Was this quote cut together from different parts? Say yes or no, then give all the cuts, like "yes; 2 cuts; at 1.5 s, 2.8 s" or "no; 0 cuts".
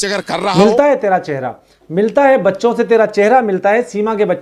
no; 0 cuts